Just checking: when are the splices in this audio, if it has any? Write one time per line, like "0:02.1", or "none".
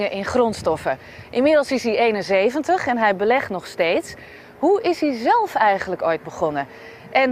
none